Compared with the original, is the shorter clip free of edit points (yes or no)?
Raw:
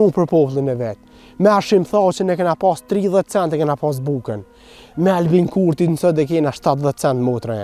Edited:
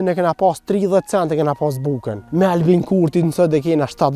no